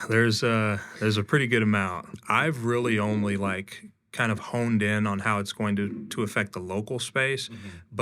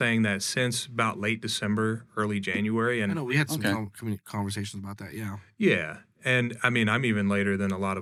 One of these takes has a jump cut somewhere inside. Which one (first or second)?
first